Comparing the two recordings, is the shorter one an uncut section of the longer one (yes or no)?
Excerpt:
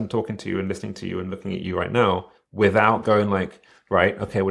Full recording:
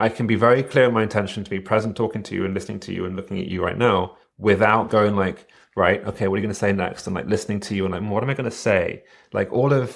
yes